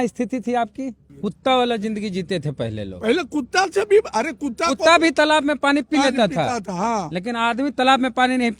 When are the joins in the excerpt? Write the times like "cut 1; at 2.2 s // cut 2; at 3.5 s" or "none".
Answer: cut 1; at 1.0 s